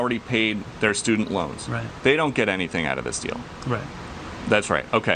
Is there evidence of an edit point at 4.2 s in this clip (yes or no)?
yes